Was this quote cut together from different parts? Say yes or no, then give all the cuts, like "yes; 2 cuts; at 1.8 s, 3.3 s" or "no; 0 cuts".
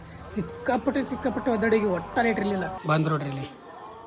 yes; 1 cut; at 2.8 s